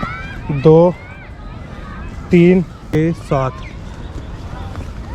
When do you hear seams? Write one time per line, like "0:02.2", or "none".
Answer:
0:02.9